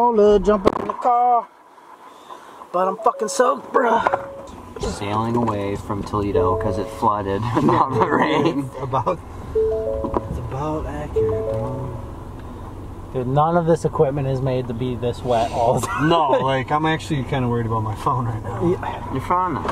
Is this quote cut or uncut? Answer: uncut